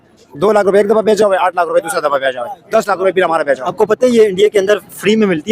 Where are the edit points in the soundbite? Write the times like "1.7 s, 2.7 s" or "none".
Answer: 3.7 s